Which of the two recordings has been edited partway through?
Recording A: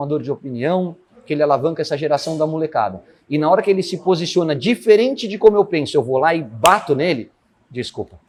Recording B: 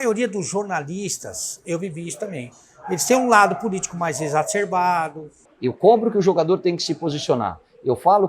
B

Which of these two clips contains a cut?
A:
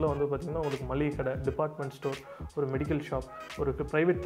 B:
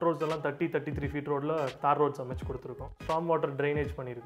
B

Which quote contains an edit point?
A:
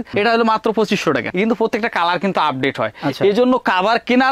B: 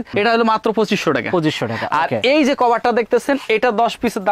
A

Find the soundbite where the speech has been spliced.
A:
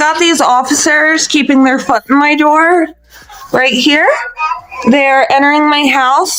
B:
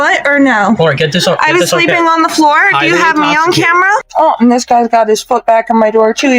B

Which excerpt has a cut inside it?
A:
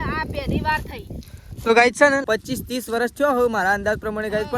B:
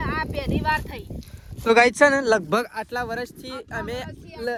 A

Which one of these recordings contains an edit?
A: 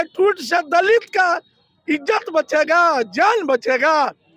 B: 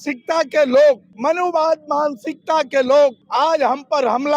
B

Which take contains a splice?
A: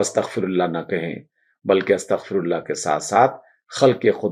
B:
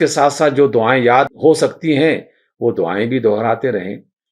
B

